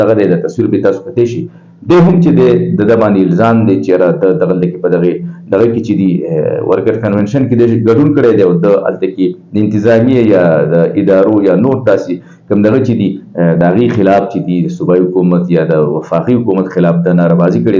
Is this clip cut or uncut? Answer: uncut